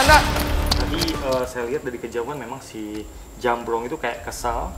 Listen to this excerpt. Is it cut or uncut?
cut